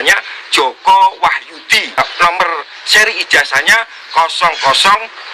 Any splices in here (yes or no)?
yes